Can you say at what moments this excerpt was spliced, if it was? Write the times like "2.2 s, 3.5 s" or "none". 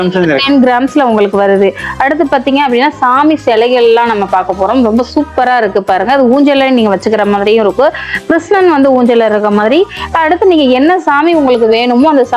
none